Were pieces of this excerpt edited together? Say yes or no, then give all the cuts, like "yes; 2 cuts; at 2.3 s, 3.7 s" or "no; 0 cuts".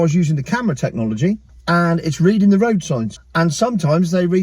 yes; 2 cuts; at 1.5 s, 3.2 s